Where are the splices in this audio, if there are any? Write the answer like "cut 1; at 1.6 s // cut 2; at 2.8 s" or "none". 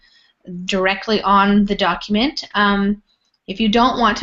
none